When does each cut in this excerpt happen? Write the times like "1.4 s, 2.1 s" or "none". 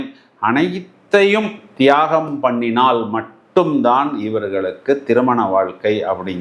none